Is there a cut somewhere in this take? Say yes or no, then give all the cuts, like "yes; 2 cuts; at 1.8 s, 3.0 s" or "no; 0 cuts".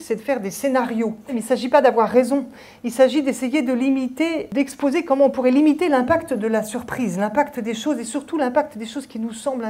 yes; 2 cuts; at 1.4 s, 4.5 s